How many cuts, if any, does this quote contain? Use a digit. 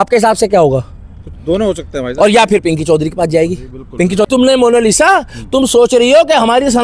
1